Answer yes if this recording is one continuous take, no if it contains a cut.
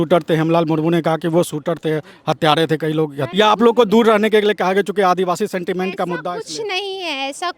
no